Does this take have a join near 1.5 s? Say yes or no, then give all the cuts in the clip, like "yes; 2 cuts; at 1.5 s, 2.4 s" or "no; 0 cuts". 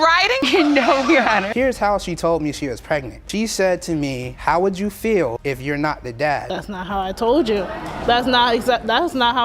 yes; 1 cut; at 1.5 s